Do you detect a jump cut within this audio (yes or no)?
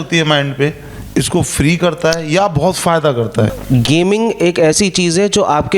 yes